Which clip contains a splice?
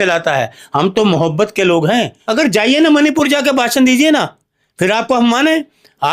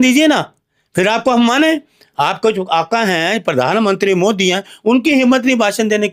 first; 1 cut; at 2.2 s

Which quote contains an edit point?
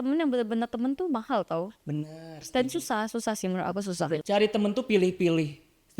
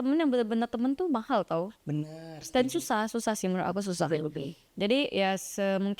first; 1 cut; at 4.2 s

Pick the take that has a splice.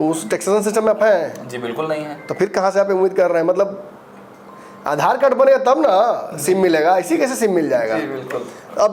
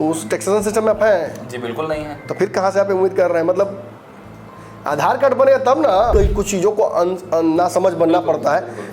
second; 1 cut; at 6.1 s

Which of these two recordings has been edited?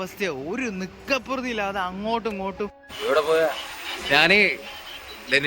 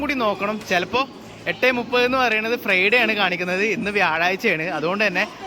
first; 1 cut; at 2.9 s

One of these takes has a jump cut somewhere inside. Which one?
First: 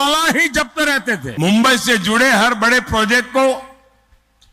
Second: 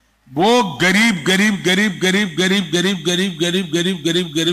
first; 1 cut; at 1.3 s

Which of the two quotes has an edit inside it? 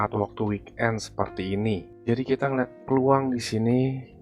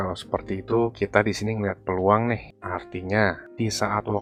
first; 1 cut; at 1.9 s

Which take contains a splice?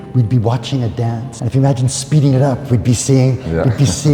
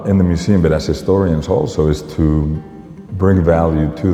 first; 1 cut; at 1.3 s

